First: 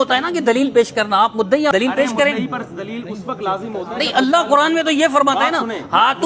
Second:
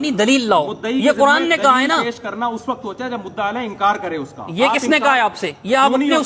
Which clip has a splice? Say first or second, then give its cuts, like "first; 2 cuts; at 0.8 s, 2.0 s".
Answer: first; 1 cut; at 1.7 s